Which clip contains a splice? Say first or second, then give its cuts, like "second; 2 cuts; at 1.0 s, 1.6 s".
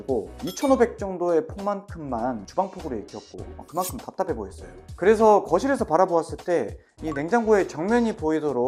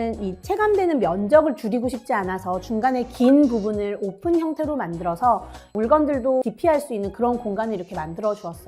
second; 2 cuts; at 5.7 s, 6.4 s